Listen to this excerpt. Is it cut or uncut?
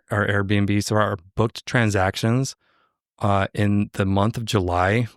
uncut